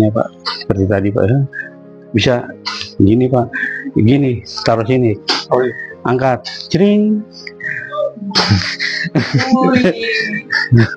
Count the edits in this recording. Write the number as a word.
zero